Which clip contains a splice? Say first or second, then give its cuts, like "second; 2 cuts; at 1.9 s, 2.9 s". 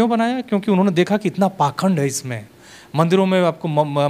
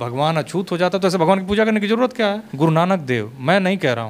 second; 1 cut; at 2.5 s